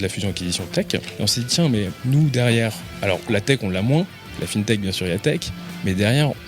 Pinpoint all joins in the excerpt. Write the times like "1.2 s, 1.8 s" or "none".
1.0 s, 2.0 s, 2.9 s, 4.4 s